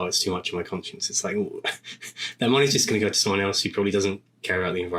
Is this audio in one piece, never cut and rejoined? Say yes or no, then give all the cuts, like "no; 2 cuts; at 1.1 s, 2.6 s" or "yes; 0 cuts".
yes; 0 cuts